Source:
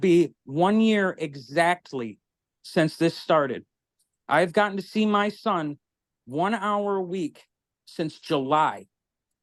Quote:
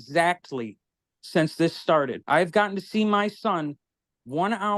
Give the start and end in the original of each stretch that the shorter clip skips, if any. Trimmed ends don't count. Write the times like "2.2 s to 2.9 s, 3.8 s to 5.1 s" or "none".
3.6 s to 4.2 s